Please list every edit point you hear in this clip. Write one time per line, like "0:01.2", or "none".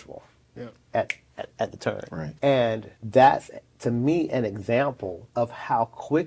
0:02.2
0:02.9
0:05.1